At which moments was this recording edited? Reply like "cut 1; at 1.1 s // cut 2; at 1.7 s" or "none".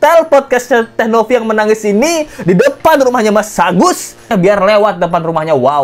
cut 1; at 4.3 s